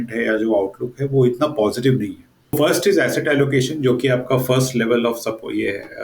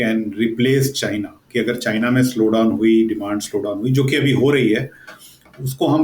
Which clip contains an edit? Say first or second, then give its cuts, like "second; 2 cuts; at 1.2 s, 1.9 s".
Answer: first; 1 cut; at 2.5 s